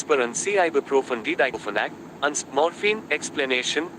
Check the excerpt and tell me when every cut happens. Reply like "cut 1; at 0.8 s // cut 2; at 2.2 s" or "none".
cut 1; at 1.4 s